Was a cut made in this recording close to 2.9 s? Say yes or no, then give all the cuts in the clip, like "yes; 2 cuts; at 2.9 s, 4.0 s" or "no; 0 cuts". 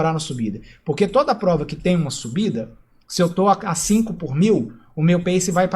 no; 1 cut; at 4.7 s